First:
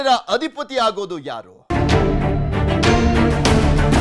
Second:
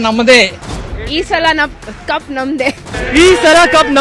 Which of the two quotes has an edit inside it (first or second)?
first